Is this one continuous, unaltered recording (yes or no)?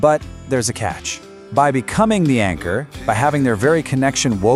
yes